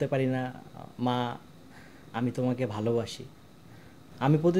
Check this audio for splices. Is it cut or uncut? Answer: uncut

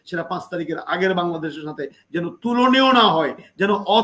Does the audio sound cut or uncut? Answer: uncut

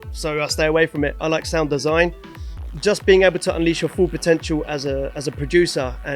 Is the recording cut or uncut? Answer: cut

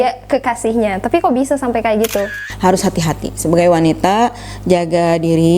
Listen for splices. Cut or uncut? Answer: cut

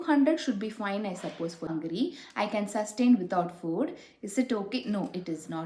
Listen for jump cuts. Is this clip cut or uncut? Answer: cut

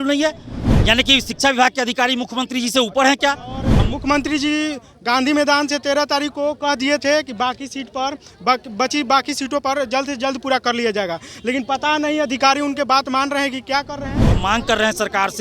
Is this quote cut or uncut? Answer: cut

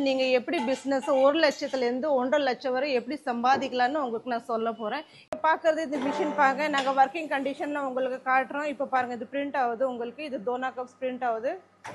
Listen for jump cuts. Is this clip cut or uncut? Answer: cut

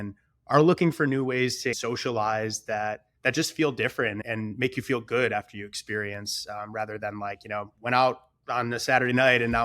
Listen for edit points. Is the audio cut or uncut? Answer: cut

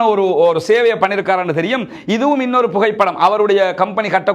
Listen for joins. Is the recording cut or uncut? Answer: uncut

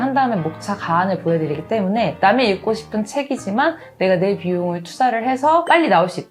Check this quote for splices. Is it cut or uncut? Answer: uncut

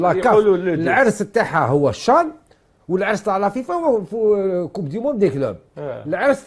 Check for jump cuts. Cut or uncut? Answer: uncut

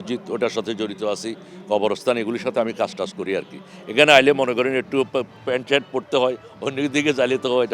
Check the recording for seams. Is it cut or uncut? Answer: uncut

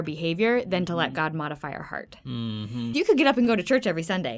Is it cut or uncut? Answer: cut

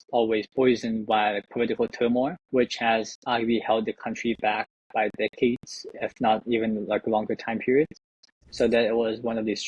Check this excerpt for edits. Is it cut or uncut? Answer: uncut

